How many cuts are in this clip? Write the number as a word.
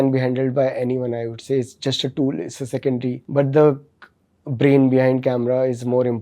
one